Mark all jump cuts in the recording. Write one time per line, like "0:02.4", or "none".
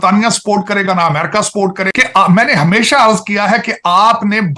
0:01.8